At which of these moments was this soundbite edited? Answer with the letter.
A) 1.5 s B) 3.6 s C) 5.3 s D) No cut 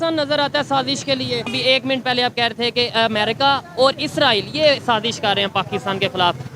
A